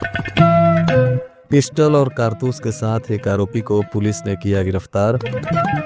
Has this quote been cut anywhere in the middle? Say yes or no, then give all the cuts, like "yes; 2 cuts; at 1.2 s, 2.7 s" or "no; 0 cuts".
yes; 1 cut; at 1.3 s